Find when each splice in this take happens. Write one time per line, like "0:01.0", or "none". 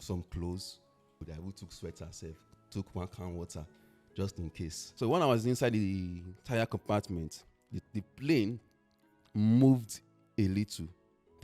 0:01.3
0:04.8